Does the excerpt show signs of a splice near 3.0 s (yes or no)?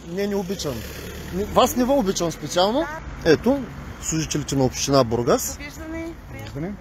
yes